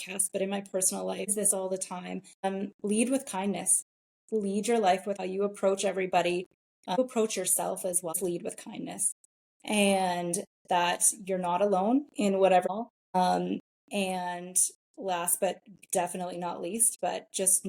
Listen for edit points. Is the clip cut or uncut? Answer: cut